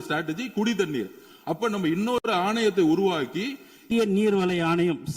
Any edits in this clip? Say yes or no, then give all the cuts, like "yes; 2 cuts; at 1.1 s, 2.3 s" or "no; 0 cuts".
yes; 1 cut; at 3.8 s